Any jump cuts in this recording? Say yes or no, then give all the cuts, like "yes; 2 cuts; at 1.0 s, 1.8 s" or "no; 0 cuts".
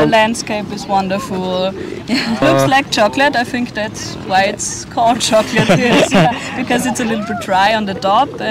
yes; 1 cut; at 2.4 s